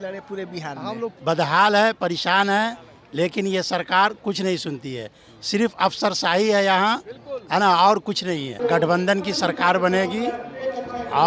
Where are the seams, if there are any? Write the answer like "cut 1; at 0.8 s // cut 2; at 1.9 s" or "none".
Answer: cut 1; at 1.2 s // cut 2; at 8.6 s

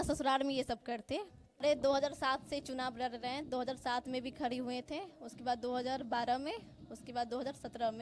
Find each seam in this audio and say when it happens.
cut 1; at 1.6 s

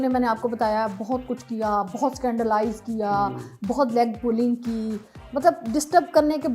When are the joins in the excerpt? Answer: none

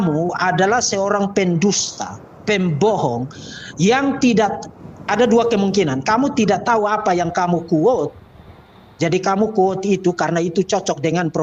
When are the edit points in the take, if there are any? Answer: none

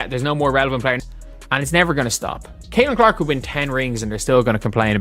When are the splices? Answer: cut 1; at 1.0 s

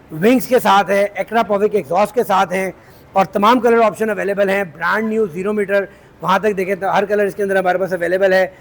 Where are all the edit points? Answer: none

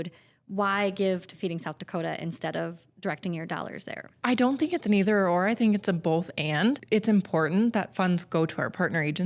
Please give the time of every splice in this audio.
cut 1; at 4.1 s // cut 2; at 6.8 s

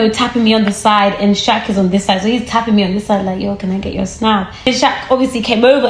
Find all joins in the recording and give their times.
cut 1; at 4.7 s

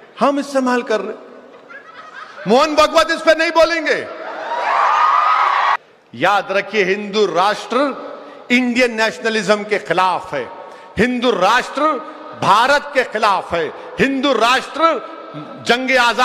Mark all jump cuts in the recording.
cut 1; at 5.8 s

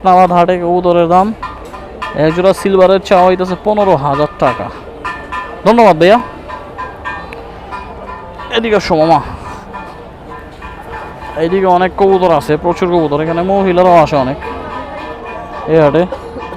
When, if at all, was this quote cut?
none

